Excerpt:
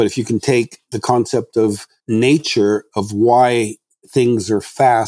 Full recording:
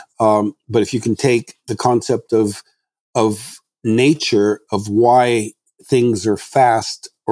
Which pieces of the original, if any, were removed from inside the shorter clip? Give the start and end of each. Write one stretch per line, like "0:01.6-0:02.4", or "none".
0:02.7-0:03.7